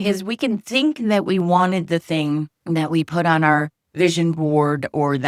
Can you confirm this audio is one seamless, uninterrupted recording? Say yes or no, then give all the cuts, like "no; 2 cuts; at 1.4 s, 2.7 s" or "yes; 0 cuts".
no; 1 cut; at 2.5 s